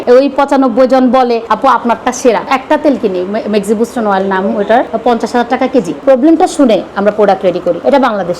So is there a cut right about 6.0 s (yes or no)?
yes